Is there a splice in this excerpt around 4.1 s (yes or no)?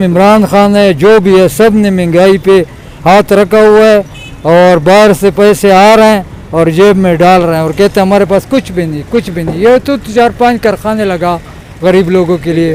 no